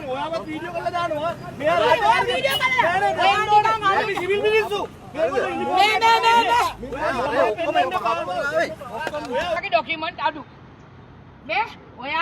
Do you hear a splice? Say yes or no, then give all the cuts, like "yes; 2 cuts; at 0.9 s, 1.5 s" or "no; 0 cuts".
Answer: yes; 1 cut; at 9.6 s